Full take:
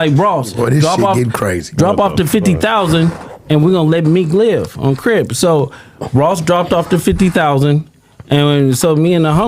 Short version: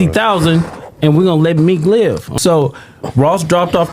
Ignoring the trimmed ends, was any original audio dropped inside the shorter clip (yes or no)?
yes